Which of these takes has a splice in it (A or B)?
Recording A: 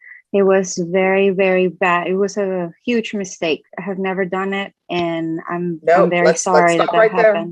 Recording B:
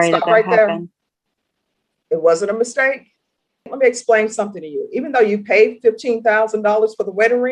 B